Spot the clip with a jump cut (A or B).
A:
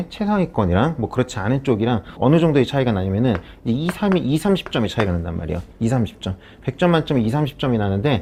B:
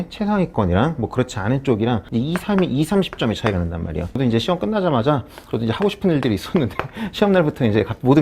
B